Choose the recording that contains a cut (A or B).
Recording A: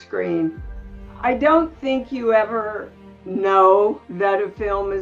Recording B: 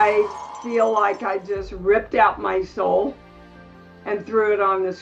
A